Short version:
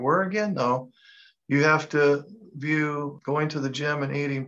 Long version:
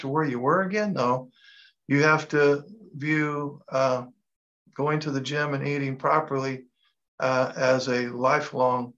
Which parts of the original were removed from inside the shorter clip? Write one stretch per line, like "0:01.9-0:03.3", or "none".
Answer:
0:03.5-0:04.7